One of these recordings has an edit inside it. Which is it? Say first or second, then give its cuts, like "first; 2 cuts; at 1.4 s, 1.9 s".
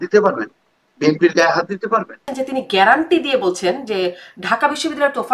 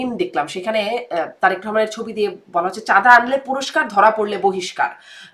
first; 1 cut; at 2.3 s